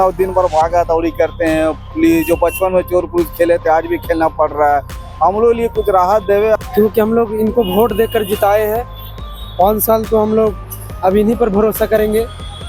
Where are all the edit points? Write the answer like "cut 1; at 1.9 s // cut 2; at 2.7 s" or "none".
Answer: cut 1; at 6.6 s